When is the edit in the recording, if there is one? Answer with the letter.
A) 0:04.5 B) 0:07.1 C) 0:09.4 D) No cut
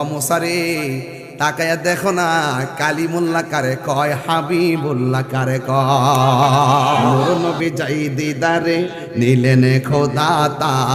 B